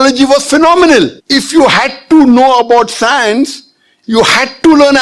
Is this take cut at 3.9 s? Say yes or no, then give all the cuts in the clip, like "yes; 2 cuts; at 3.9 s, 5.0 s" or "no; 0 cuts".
yes; 2 cuts; at 1.2 s, 3.9 s